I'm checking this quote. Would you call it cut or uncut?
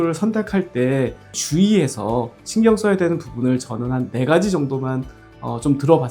cut